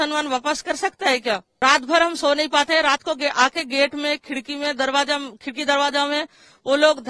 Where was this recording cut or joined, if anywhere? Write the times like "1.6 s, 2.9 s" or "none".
1.5 s